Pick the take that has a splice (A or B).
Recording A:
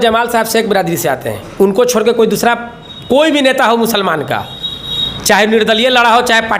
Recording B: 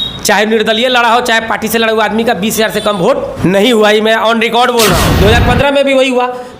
B